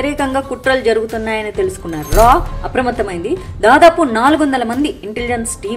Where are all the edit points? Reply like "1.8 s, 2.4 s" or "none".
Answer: none